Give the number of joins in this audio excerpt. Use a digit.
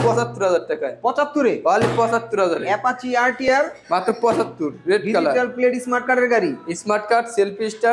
0